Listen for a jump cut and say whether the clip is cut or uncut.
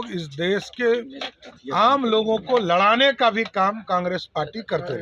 uncut